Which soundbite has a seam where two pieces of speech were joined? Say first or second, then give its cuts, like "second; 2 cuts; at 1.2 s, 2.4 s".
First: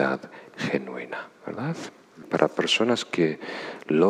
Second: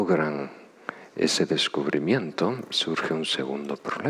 first; 1 cut; at 2.2 s